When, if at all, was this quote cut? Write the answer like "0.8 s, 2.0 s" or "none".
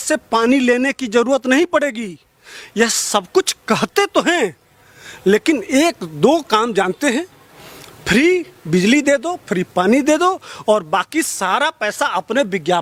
none